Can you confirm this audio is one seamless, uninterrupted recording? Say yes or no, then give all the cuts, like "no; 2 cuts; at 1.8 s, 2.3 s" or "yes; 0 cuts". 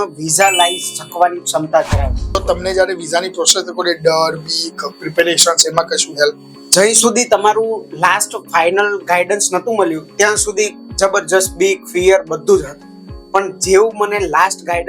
no; 1 cut; at 2.4 s